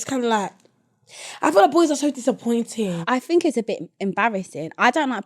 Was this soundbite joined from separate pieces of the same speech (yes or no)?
yes